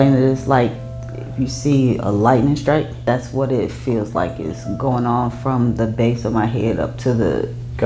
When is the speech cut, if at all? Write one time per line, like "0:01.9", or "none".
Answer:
0:02.9